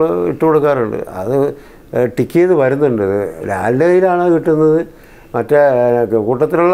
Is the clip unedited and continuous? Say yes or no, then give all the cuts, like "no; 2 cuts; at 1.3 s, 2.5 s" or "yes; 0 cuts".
yes; 0 cuts